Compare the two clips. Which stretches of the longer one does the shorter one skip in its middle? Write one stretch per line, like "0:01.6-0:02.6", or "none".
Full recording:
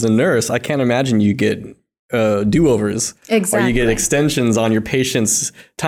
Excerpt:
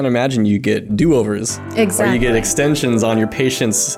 0:01.6-0:02.4